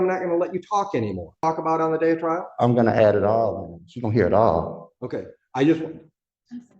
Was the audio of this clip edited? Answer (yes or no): yes